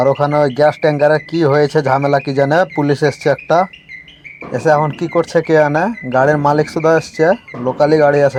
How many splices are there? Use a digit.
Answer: 0